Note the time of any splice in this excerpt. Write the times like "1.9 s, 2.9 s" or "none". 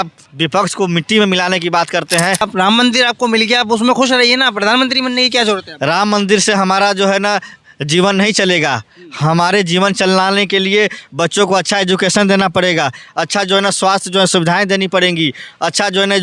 2.5 s